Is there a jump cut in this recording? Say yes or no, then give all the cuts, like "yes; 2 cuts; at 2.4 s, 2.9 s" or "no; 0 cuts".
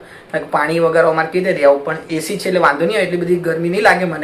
no; 0 cuts